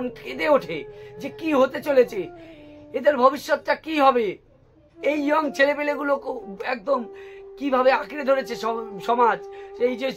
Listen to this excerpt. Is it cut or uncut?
uncut